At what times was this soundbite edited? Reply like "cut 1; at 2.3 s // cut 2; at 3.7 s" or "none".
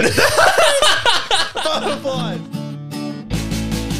cut 1; at 2.2 s